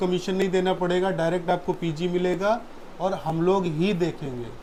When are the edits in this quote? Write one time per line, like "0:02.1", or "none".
none

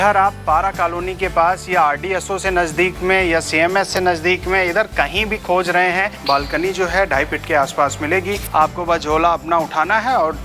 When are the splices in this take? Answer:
0:06.1
0:08.4

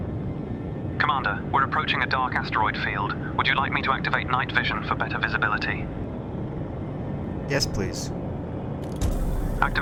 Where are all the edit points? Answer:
none

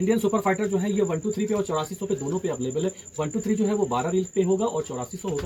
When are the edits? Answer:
none

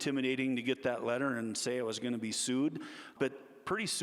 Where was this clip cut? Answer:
0:03.1

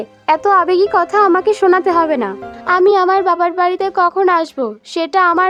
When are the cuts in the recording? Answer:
none

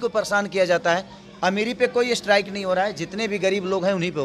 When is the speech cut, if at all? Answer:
none

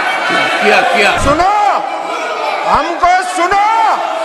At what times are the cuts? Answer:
0:01.2

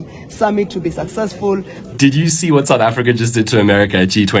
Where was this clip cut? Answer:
0:01.7

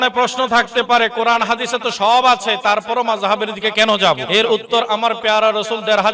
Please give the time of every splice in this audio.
0:04.2

